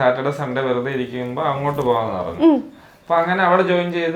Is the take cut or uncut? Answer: uncut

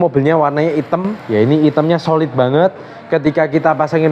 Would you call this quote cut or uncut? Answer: cut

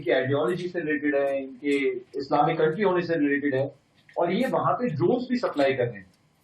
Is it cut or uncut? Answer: uncut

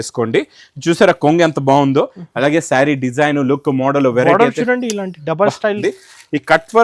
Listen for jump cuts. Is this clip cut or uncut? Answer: cut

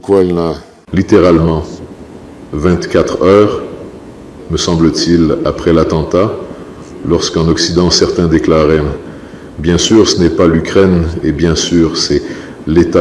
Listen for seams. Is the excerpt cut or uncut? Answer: uncut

